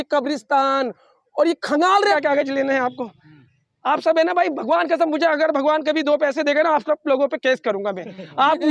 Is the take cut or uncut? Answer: cut